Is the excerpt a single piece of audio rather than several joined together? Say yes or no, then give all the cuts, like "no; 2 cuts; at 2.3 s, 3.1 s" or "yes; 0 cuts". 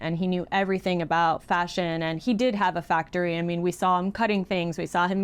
yes; 0 cuts